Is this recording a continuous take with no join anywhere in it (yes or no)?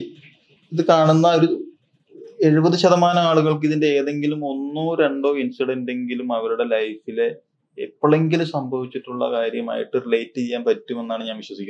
yes